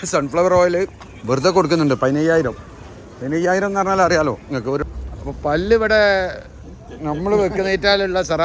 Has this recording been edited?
yes; 2 cuts; at 1.1 s, 4.8 s

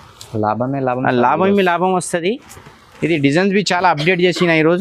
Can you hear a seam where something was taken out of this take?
no; 0 cuts

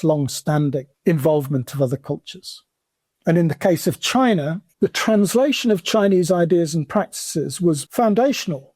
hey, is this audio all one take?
no; 3 cuts; at 0.9 s, 4.6 s, 7.8 s

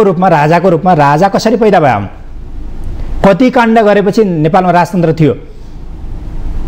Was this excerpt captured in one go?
yes; 0 cuts

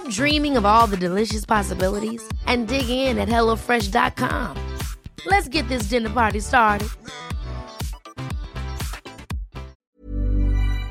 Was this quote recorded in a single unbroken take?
no; 1 cut; at 9.8 s

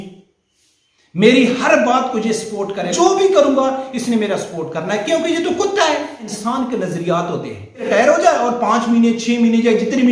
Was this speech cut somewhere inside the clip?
yes; 3 cuts; at 2.9 s, 6.3 s, 7.9 s

